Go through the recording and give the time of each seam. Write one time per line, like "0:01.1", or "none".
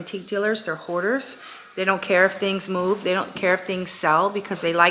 none